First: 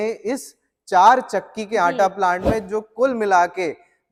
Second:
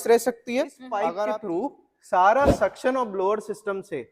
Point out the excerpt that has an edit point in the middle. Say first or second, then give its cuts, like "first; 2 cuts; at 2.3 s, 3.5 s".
second; 1 cut; at 1.1 s